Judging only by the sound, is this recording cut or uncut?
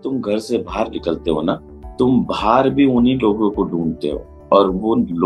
cut